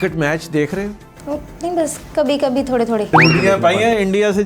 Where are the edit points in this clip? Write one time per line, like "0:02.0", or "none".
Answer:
0:03.1

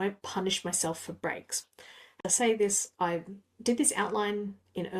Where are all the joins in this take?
0:02.2

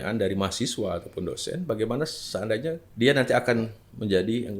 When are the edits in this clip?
0:02.9

